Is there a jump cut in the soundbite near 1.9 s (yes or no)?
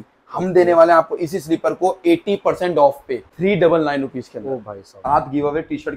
no